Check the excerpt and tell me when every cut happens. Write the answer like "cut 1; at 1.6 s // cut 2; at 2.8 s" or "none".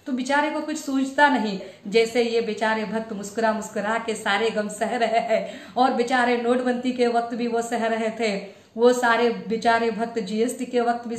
cut 1; at 1.7 s